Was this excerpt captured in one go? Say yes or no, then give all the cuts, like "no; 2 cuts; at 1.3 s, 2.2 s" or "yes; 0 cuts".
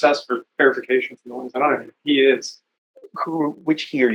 yes; 0 cuts